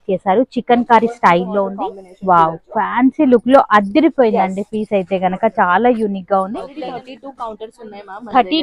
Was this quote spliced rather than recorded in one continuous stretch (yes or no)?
yes